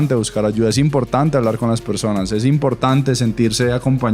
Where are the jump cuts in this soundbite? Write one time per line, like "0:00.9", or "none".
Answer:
none